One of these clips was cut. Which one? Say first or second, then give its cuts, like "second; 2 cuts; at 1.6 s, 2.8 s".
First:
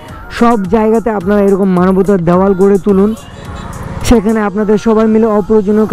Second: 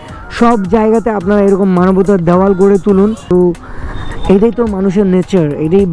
second; 1 cut; at 3.3 s